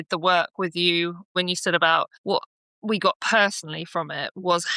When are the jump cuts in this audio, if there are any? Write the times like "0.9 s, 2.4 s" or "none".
1.3 s, 2.2 s